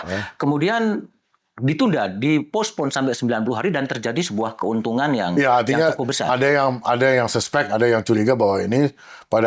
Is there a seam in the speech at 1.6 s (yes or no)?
no